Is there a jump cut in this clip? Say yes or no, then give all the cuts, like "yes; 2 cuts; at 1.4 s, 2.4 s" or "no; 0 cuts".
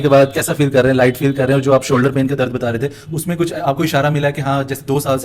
no; 0 cuts